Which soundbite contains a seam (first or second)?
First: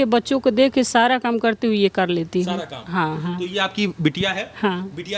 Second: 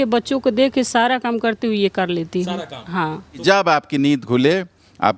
second